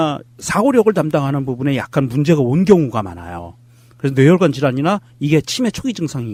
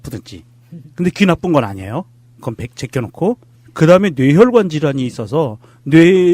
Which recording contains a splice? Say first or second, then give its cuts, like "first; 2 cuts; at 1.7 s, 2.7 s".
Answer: second; 1 cut; at 3.7 s